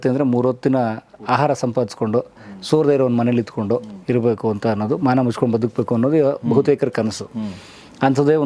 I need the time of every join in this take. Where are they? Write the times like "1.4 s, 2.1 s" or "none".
none